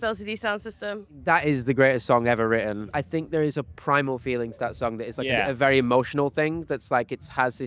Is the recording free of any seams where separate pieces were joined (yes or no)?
no